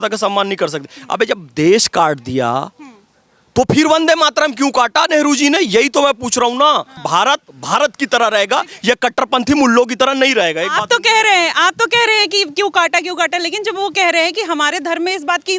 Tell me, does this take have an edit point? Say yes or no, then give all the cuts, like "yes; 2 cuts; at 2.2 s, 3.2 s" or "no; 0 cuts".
yes; 1 cut; at 7.0 s